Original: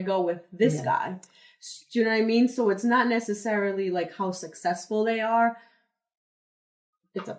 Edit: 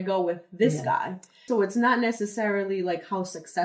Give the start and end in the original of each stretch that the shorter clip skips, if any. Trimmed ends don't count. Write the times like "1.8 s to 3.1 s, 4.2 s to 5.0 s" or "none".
1.5 s to 2.5 s